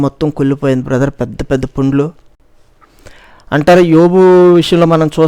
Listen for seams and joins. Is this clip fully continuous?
yes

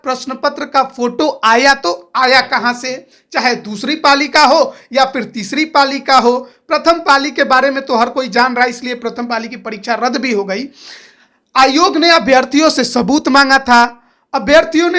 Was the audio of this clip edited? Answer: no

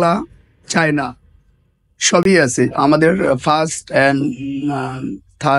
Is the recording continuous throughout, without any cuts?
yes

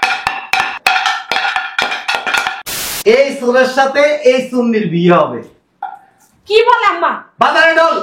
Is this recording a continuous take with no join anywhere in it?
no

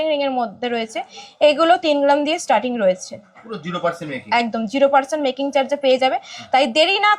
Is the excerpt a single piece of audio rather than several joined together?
yes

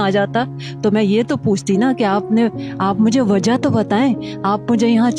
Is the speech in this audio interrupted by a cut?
no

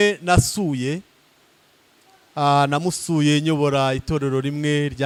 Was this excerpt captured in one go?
yes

